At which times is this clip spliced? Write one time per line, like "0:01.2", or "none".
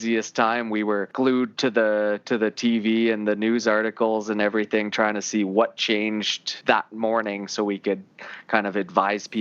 0:01.1
0:06.5